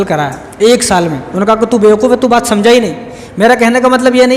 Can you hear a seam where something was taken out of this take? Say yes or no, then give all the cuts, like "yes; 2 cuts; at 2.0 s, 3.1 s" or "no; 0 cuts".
yes; 1 cut; at 1.2 s